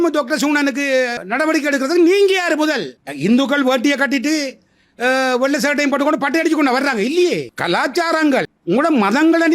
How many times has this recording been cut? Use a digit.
2